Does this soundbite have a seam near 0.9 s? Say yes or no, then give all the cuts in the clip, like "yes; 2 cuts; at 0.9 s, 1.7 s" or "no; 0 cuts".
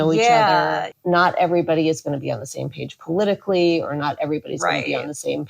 yes; 1 cut; at 0.9 s